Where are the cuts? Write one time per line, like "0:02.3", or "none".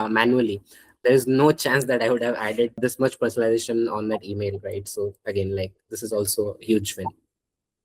0:00.9
0:02.8